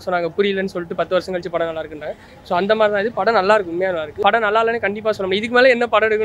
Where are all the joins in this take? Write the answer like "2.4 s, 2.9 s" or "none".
4.1 s